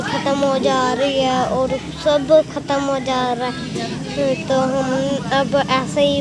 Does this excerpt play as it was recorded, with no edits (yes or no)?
yes